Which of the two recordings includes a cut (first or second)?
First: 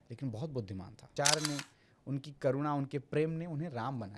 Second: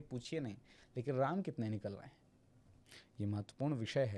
first